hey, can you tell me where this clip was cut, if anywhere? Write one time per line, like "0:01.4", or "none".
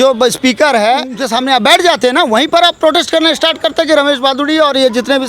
0:01.2